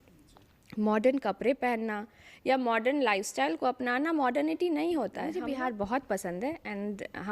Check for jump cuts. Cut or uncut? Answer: cut